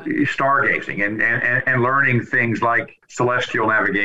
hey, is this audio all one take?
no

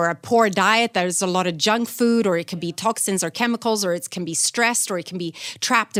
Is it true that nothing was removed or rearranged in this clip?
yes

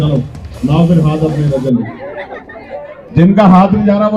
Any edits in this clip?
yes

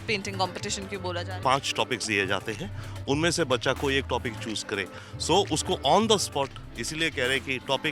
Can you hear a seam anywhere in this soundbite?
yes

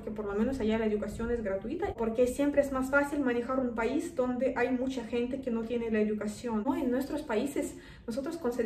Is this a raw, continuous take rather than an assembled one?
no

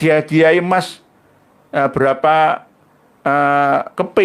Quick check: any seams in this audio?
no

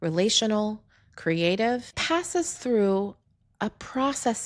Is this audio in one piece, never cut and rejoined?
no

